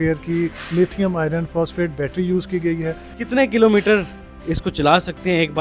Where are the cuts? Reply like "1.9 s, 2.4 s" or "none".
3.1 s